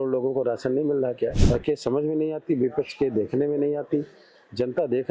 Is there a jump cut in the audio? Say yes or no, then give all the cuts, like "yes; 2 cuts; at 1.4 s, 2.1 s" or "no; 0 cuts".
yes; 1 cut; at 1.4 s